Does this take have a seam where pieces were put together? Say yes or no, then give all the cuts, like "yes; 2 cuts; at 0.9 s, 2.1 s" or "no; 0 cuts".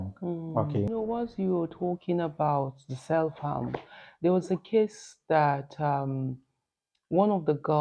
yes; 1 cut; at 0.9 s